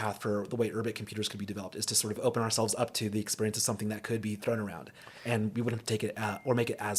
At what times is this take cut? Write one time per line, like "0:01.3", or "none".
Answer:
0:02.2